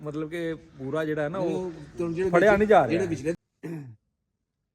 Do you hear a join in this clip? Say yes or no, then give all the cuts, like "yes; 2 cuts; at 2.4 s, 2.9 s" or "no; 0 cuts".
yes; 1 cut; at 3.4 s